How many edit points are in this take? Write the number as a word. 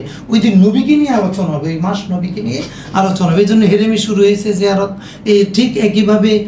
zero